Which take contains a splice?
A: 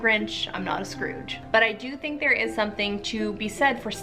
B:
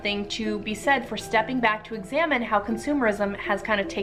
A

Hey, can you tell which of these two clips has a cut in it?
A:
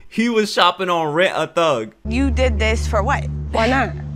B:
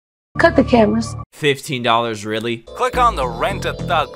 B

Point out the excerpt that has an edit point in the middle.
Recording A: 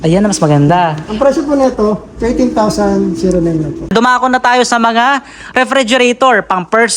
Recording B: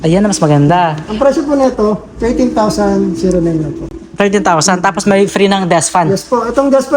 A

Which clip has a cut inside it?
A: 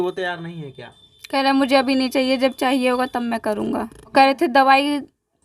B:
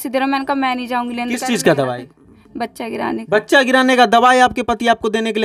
A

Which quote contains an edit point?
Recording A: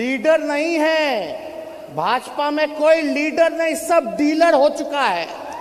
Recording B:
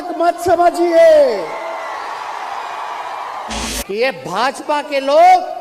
B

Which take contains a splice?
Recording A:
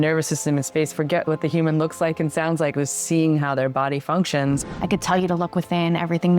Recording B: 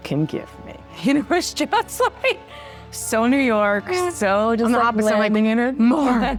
A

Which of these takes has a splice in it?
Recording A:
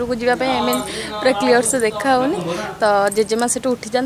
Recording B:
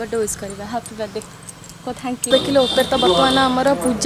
B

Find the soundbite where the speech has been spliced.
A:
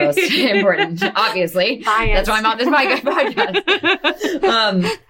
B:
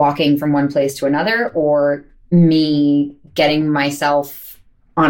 B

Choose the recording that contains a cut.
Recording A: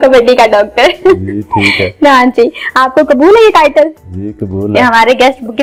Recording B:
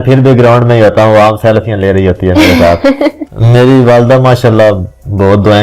B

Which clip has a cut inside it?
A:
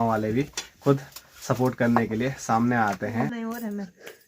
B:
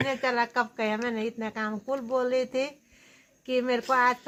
A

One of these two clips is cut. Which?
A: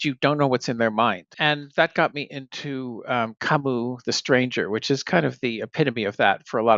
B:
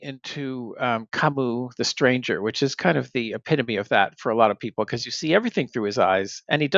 A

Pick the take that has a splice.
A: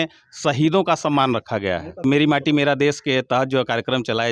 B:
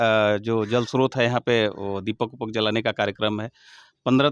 A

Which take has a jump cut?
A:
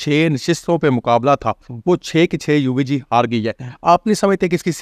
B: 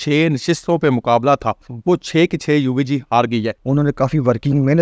B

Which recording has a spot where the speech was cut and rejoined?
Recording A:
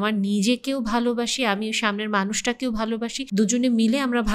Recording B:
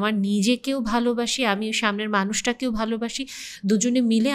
A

